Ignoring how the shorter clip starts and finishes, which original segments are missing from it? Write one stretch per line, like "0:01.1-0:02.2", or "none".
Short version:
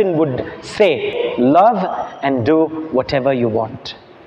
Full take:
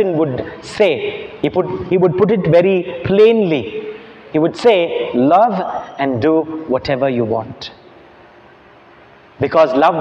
0:01.2-0:04.9